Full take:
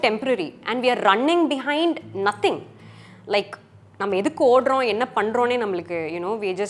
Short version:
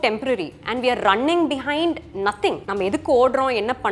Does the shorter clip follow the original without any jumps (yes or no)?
no